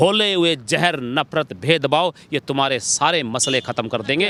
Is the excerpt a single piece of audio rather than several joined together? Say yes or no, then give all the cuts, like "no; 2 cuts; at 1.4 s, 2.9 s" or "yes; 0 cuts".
yes; 0 cuts